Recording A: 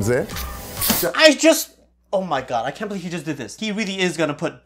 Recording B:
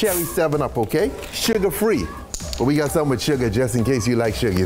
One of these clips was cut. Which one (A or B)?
A